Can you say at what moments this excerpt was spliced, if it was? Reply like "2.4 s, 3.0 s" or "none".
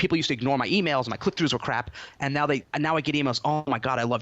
2.7 s